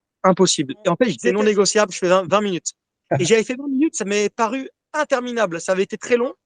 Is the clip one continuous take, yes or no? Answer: no